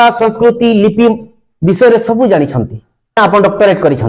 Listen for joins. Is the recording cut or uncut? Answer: cut